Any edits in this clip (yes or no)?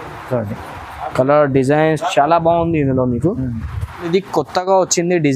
yes